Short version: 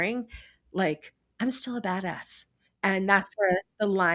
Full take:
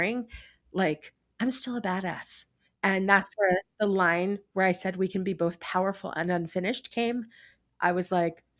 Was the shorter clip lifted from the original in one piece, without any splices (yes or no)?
yes